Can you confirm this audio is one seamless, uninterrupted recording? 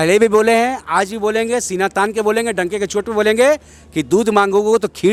yes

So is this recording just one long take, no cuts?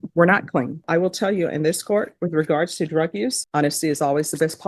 no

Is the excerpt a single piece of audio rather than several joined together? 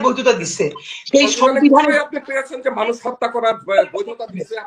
yes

